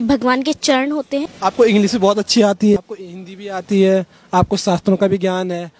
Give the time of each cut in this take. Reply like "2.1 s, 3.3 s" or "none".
1.3 s, 2.8 s